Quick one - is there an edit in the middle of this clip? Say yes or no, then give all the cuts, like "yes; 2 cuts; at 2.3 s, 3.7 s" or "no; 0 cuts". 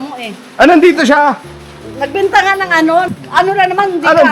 yes; 1 cut; at 3.1 s